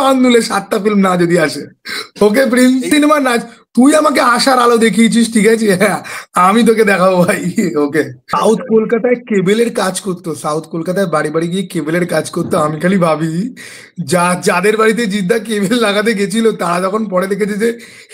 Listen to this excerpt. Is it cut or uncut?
cut